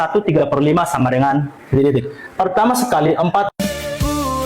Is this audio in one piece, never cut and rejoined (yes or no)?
no